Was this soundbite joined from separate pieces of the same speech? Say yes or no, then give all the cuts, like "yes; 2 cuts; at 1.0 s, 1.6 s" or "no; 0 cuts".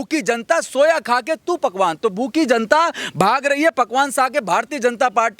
no; 0 cuts